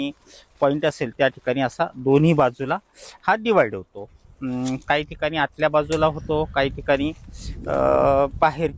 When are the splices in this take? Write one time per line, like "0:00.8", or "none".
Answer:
none